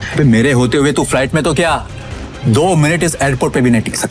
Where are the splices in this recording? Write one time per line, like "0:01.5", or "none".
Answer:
none